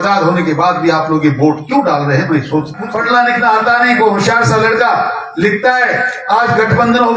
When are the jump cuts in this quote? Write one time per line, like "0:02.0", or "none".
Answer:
0:02.9